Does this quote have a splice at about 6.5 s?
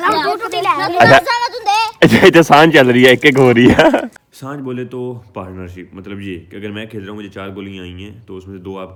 no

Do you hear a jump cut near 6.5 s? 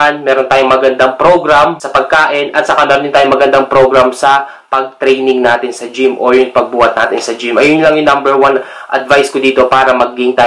no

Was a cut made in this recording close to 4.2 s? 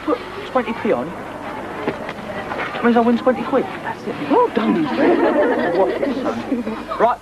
yes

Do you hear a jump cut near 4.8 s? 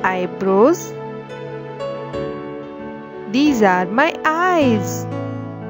yes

